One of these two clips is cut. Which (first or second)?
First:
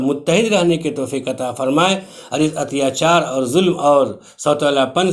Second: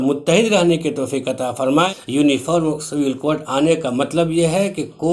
second